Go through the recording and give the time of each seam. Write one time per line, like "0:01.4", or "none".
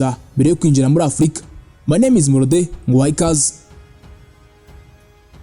0:03.5